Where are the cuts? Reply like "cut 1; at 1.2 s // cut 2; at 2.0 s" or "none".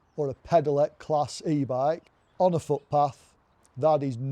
cut 1; at 2.2 s